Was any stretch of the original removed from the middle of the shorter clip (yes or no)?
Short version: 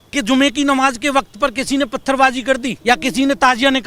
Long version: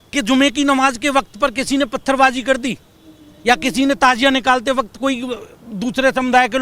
yes